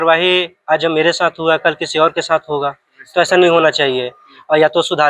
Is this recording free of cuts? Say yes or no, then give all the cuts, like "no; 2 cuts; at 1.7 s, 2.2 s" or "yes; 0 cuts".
yes; 0 cuts